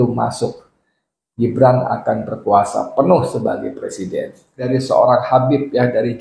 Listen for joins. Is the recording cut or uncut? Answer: cut